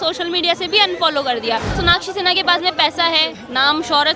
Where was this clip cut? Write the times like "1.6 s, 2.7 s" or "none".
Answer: 1.8 s